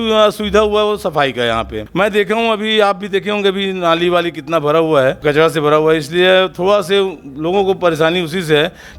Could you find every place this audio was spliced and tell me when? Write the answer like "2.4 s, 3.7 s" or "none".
1.8 s, 5.2 s